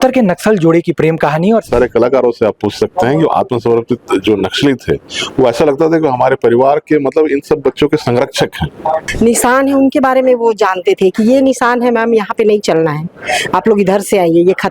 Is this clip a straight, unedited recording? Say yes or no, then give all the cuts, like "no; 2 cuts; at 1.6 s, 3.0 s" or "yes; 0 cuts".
no; 2 cuts; at 1.7 s, 9.1 s